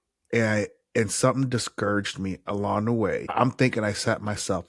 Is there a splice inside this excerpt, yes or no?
yes